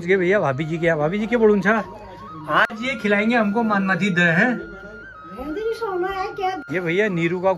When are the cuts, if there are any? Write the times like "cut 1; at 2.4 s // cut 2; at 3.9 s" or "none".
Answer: cut 1; at 6.6 s